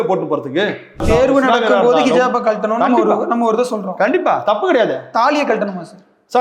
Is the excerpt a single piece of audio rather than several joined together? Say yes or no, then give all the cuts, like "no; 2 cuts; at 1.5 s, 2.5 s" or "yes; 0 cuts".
no; 1 cut; at 1.0 s